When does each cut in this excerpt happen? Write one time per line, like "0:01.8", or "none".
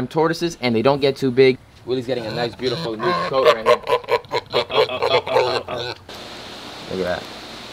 0:01.6
0:06.0